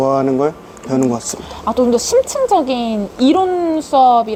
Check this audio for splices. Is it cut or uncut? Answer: uncut